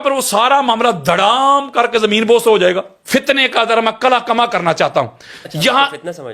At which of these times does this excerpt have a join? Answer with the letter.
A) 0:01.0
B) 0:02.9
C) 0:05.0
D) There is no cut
B